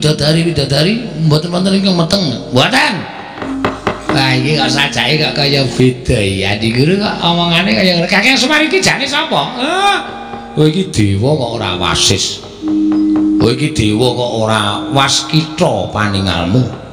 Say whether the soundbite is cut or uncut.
cut